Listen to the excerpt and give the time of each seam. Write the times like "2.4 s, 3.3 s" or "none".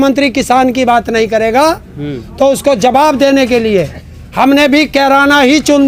none

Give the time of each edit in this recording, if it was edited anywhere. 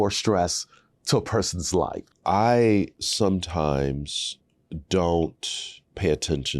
2.1 s

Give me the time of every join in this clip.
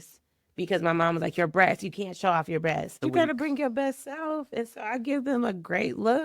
3.0 s

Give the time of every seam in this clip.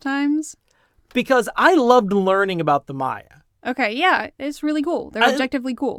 none

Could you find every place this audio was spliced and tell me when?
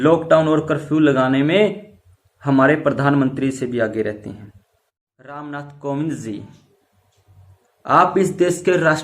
5.2 s

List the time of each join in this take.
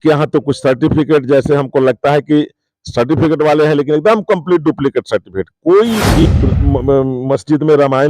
6.2 s

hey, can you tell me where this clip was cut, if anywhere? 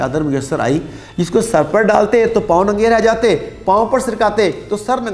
none

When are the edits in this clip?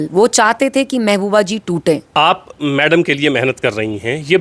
2.1 s

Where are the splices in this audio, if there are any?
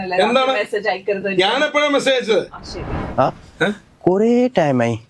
3.0 s

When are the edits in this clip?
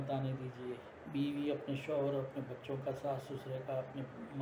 0.9 s

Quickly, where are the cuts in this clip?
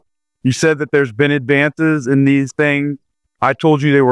none

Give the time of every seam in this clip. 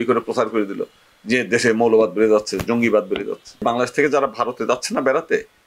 3.6 s

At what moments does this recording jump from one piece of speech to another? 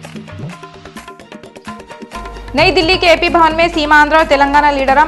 none

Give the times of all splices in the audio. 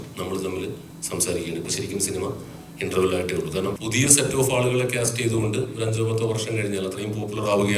3.7 s

